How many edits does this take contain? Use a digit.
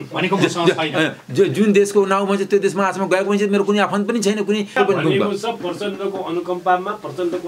1